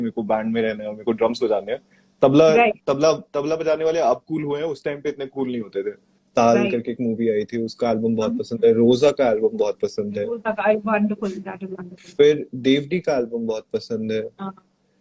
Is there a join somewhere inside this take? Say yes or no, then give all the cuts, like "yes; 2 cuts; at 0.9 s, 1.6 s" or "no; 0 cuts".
yes; 1 cut; at 6.1 s